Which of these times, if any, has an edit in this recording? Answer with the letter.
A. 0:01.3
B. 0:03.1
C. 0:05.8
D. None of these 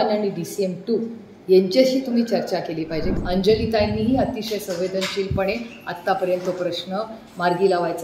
B